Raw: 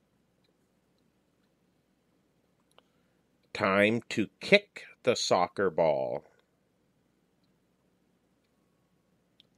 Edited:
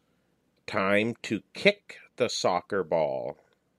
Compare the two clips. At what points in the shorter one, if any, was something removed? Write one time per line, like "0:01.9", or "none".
none

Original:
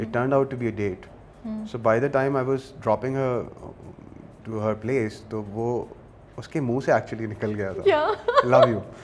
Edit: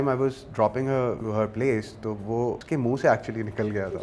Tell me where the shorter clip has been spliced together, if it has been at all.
0:01.2
0:02.6

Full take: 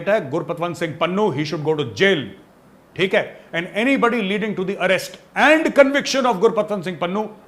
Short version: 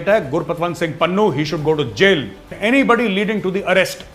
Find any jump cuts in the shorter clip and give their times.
0:02.4

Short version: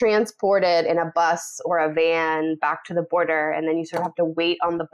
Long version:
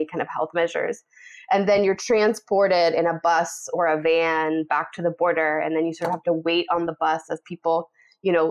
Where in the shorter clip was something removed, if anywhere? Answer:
none

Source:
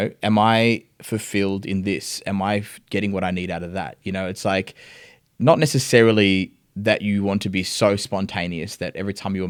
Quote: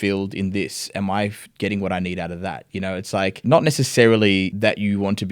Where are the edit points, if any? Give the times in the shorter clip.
0:03.4
0:04.5

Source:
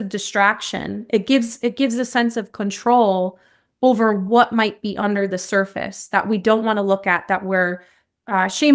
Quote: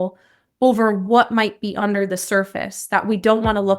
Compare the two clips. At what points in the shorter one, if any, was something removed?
none

